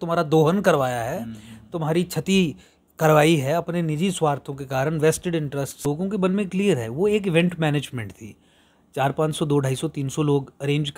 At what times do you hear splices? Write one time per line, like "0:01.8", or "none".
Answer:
0:05.9